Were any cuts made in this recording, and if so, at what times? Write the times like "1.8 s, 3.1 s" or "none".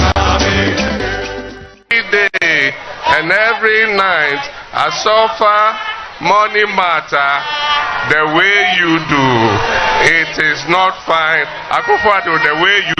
1.7 s